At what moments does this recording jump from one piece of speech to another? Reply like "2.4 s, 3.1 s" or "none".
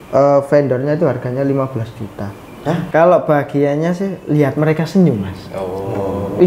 2.8 s